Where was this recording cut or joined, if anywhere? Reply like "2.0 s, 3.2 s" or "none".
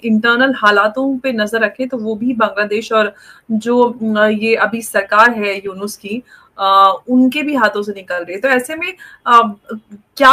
none